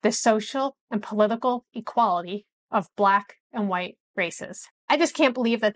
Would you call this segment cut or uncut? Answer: cut